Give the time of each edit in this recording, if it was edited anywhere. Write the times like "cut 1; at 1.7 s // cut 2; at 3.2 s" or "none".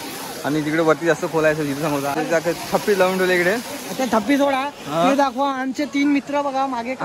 cut 1; at 2.1 s